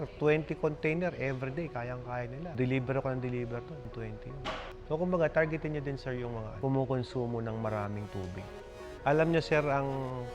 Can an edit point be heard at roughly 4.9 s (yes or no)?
no